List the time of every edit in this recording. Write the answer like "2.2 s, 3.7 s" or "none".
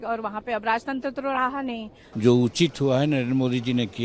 2.0 s